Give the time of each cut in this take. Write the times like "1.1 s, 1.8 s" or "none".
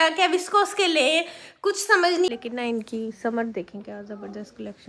2.3 s

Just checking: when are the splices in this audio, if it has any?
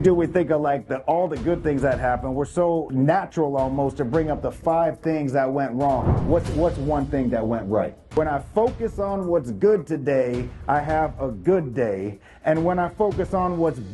2.9 s, 8.0 s

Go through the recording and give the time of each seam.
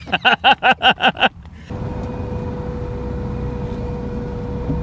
1.7 s

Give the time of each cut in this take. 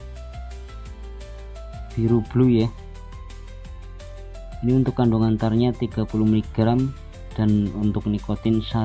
1.9 s, 2.7 s, 4.6 s

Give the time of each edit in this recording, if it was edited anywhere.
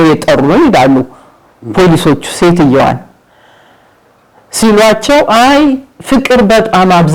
none

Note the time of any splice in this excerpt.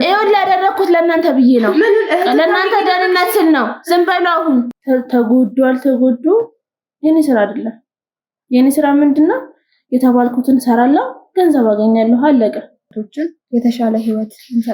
4.7 s, 13.0 s

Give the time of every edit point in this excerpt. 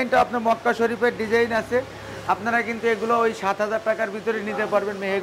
none

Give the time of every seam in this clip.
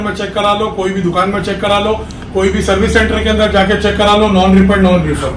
none

